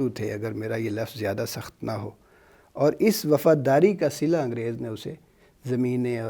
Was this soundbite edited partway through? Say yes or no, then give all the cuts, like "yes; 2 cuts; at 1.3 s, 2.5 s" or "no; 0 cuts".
no; 0 cuts